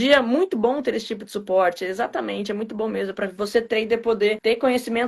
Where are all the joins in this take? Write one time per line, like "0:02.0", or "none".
none